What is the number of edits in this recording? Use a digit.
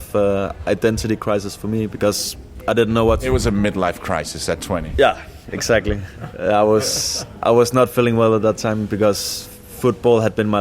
0